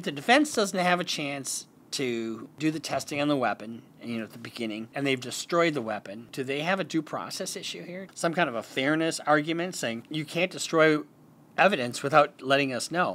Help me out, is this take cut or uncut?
cut